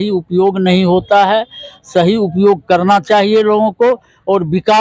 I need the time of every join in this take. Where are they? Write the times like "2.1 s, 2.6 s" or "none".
none